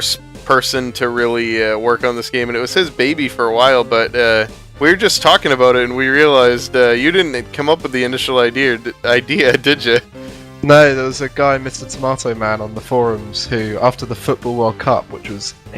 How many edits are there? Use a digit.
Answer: 1